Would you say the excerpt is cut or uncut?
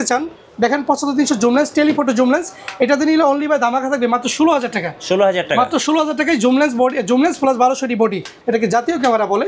cut